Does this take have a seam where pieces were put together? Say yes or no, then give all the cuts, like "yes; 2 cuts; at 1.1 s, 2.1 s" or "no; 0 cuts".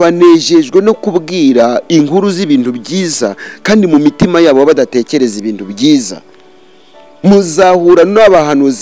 no; 0 cuts